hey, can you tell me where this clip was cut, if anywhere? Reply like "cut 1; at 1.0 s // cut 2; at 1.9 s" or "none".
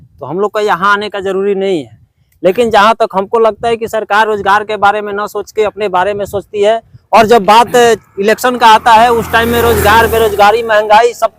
none